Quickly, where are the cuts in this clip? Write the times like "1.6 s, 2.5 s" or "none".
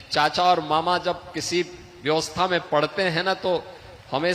none